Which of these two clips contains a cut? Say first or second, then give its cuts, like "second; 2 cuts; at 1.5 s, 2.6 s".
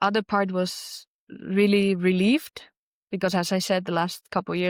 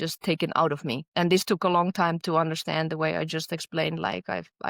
second; 1 cut; at 1.0 s